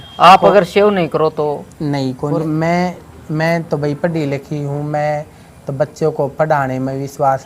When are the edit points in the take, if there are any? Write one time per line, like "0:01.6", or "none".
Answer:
0:02.4